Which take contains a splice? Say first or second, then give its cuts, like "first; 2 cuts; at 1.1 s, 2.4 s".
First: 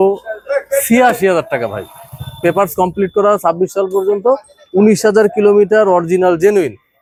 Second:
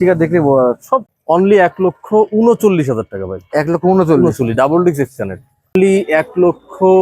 second; 2 cuts; at 1.1 s, 5.7 s